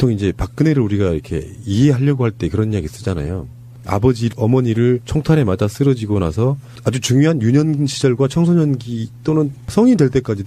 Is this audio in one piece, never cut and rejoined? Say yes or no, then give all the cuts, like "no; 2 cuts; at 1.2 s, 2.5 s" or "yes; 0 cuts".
no; 1 cut; at 7.9 s